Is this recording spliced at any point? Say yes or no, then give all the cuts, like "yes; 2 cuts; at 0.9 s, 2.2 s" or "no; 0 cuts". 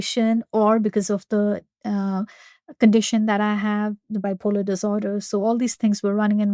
no; 0 cuts